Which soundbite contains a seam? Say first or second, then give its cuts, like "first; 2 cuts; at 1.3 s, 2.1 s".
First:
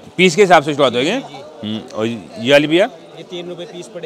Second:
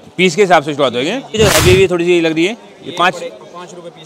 second; 1 cut; at 1.4 s